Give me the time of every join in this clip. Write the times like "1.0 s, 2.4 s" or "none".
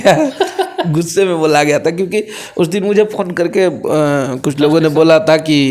none